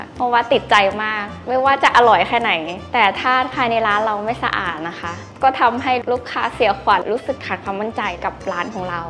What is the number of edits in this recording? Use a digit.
3